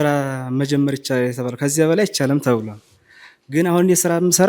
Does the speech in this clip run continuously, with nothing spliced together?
yes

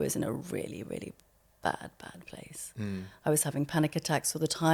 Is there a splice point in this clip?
no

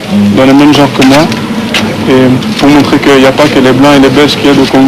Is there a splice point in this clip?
yes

